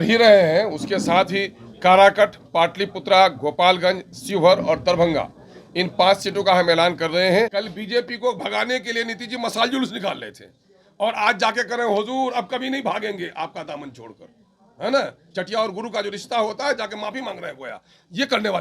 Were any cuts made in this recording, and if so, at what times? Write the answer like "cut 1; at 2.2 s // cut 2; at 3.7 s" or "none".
cut 1; at 7.5 s